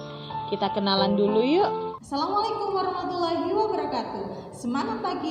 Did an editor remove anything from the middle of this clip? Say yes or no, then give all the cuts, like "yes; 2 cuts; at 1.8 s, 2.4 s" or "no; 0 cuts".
yes; 1 cut; at 1.9 s